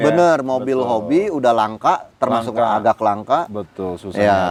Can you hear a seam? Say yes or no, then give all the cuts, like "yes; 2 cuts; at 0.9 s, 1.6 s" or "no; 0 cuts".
no; 0 cuts